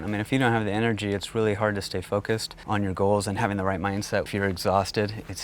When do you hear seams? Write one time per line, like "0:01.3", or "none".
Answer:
0:02.5
0:04.3